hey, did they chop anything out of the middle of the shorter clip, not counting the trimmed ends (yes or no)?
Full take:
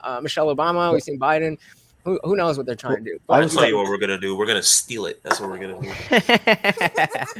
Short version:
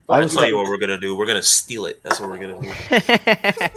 no